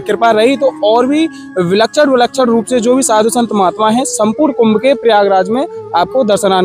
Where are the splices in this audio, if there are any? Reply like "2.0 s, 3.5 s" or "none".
none